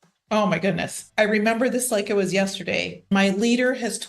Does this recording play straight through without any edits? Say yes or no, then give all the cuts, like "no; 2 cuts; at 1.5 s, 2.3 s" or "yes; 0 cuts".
no; 2 cuts; at 1.0 s, 3.1 s